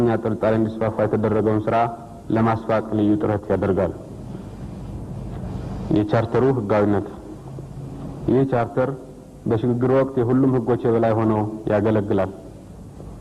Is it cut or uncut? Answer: uncut